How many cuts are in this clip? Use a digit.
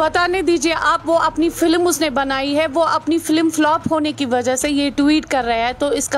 0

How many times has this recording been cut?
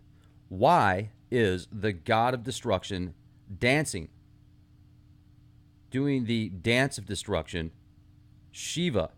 1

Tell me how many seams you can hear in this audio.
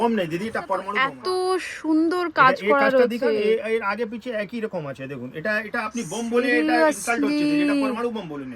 1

